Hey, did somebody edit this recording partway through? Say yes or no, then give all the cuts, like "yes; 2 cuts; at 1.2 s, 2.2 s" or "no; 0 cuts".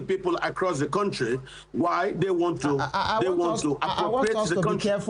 no; 0 cuts